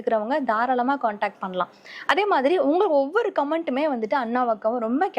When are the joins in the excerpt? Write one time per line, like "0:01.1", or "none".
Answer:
none